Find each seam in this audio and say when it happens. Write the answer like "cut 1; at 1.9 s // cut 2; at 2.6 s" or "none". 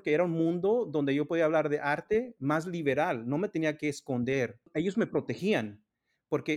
cut 1; at 4.7 s